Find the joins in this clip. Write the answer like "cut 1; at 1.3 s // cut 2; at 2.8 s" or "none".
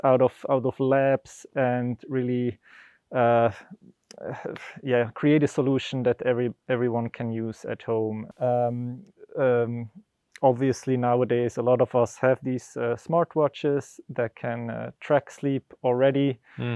cut 1; at 8.3 s